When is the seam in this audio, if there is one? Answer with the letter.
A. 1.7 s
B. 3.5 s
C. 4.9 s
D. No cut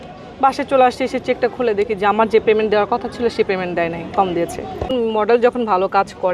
C